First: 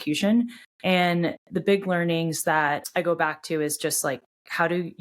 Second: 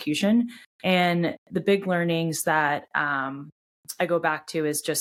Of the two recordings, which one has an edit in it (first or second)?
first